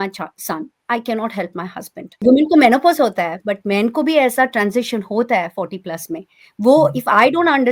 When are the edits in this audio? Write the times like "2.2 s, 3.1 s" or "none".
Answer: 2.2 s